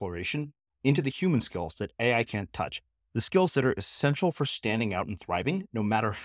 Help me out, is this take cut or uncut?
uncut